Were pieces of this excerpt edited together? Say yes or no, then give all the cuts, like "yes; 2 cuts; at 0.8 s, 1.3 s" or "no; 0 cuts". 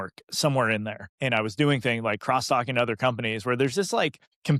no; 0 cuts